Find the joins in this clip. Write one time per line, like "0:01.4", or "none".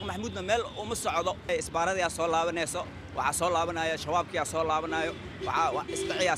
0:01.5